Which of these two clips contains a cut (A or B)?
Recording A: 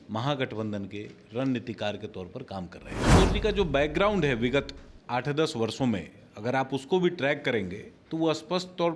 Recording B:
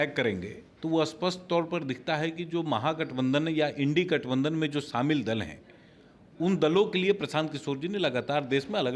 A